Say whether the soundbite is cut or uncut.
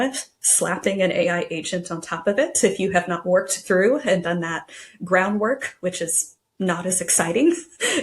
uncut